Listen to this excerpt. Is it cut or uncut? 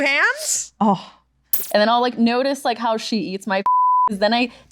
cut